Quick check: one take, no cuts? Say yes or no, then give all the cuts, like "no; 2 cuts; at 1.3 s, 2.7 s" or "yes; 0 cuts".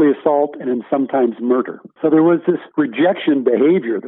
no; 2 cuts; at 1.8 s, 2.7 s